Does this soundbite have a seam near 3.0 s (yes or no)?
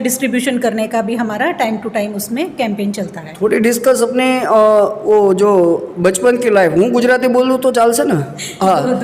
no